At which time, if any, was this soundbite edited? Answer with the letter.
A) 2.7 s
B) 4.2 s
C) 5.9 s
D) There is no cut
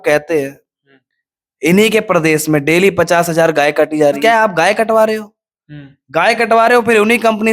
B